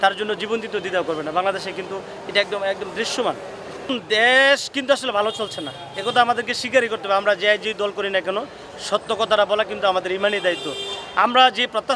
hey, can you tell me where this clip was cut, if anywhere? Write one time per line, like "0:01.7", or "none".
0:03.9